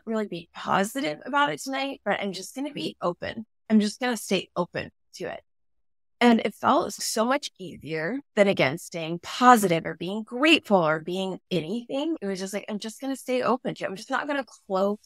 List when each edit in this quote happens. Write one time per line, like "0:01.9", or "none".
0:07.0
0:12.2